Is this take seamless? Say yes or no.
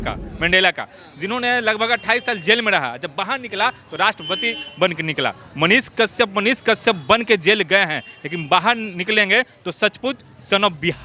yes